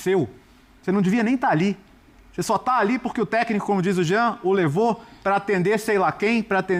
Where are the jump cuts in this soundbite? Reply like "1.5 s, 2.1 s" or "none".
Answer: none